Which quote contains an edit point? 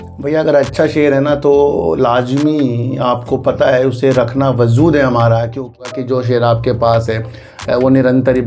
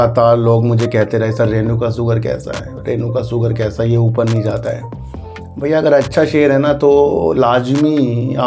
first; 1 cut; at 5.9 s

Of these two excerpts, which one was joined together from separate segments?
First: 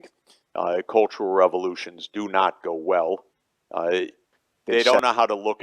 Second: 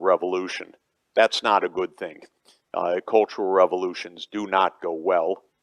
first; 1 cut; at 4.7 s

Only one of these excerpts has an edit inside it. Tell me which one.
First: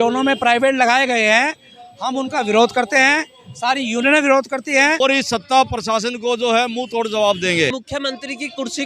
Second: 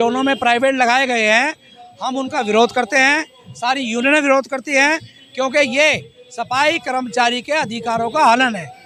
first; 2 cuts; at 5.0 s, 7.8 s

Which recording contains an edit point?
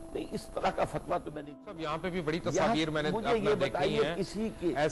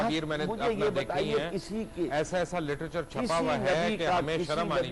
first; 1 cut; at 1.7 s

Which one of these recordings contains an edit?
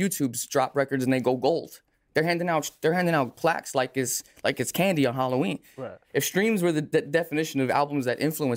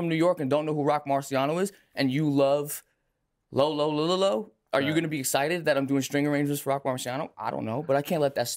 first; 1 cut; at 6.0 s

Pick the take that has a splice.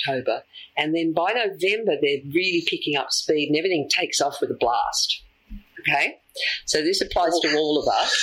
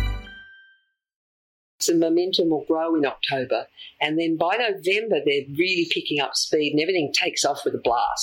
second; 1 cut; at 1.2 s

